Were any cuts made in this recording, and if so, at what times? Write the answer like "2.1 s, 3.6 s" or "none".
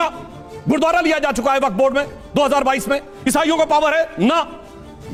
none